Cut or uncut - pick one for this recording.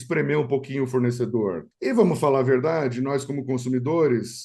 cut